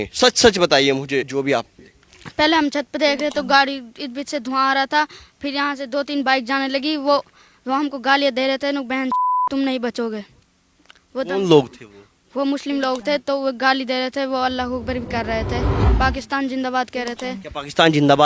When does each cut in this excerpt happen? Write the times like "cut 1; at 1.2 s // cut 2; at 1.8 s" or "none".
cut 1; at 1.3 s // cut 2; at 15.8 s

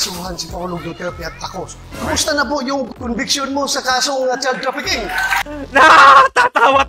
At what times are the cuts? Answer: cut 1; at 1.8 s // cut 2; at 2.9 s

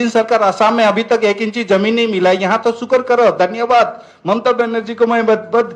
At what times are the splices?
none

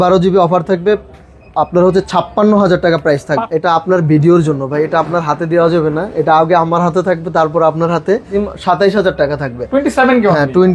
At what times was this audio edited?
cut 1; at 3.4 s // cut 2; at 8.3 s

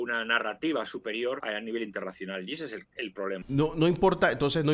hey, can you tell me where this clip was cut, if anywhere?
cut 1; at 1.4 s // cut 2; at 3.4 s

